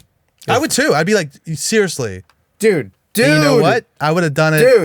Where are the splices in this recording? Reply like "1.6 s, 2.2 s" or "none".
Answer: 3.0 s